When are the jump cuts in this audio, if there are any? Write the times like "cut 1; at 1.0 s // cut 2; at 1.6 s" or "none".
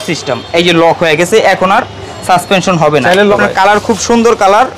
cut 1; at 3.4 s